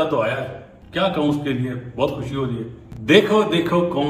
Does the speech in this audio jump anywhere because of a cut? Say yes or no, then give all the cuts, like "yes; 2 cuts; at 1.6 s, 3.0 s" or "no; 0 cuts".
no; 0 cuts